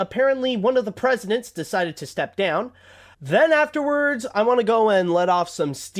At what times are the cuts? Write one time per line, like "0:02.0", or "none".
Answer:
0:03.1